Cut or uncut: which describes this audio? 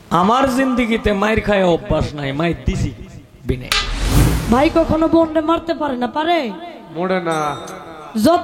cut